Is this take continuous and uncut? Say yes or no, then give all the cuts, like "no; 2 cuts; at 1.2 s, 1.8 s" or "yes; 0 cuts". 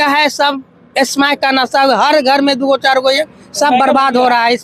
yes; 0 cuts